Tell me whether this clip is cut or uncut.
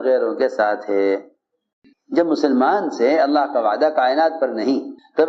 cut